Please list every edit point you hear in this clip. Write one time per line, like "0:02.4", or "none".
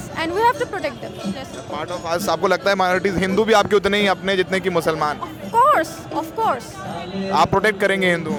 none

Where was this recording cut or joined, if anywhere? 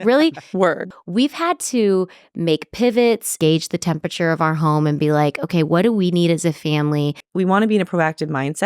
0:00.9
0:03.3
0:07.2

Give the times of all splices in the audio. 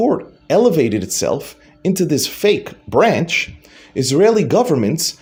none

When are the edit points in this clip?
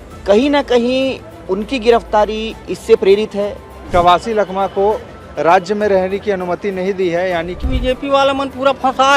0:03.7
0:07.6

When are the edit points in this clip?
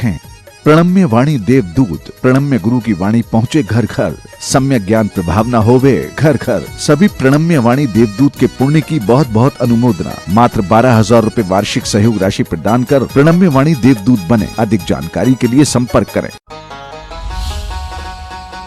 0:16.4

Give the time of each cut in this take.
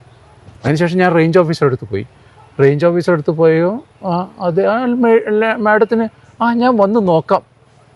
none

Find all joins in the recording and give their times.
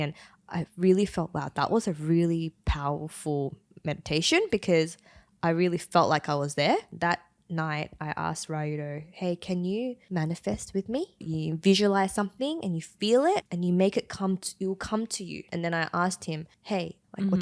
0:06.9
0:10.0
0:11.3
0:13.5
0:15.4

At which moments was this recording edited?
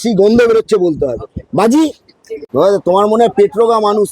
0:02.4

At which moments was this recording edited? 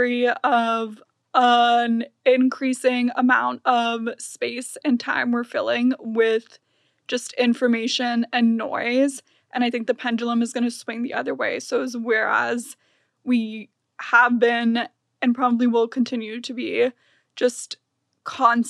none

